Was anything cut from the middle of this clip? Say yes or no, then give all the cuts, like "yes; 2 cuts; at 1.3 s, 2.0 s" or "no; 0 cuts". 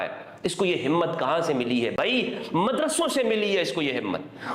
no; 0 cuts